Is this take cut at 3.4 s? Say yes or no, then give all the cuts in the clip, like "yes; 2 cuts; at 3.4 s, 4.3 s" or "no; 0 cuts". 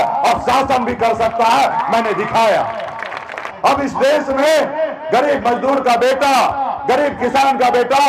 yes; 1 cut; at 3.4 s